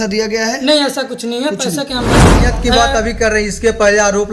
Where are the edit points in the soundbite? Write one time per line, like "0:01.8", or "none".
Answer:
0:02.4

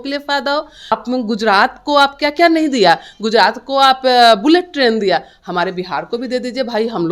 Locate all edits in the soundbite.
0:00.9

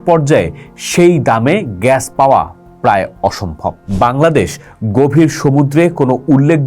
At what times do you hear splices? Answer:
0:03.8

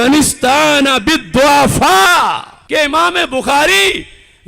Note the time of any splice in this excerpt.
0:02.5

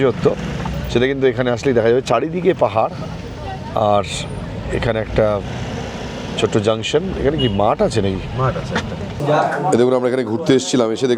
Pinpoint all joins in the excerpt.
0:09.1

